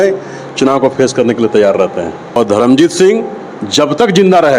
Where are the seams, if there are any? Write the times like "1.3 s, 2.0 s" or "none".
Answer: 2.2 s